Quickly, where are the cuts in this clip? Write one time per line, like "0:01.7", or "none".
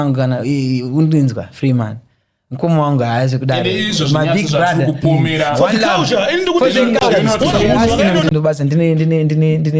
0:08.0

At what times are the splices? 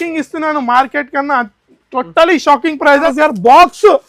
0:02.9

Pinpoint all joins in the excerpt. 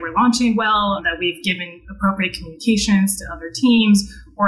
none

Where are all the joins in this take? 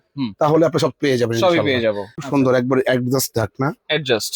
0:02.2

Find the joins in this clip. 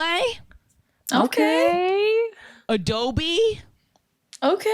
none

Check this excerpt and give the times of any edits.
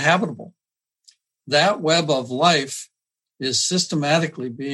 0:01.0

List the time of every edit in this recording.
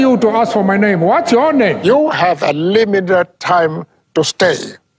0:01.8

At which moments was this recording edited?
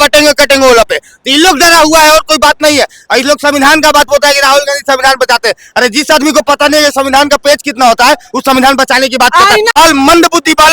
0:09.7

